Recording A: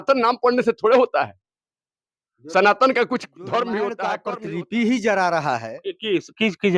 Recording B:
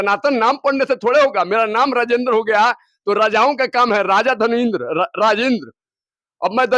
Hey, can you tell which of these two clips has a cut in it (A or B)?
A